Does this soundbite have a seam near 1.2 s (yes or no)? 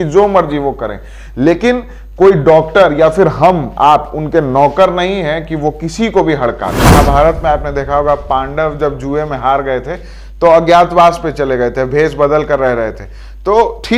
no